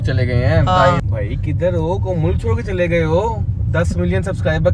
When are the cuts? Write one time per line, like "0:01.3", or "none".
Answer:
0:01.1